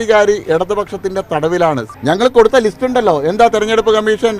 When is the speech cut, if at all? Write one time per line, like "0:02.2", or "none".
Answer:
0:01.9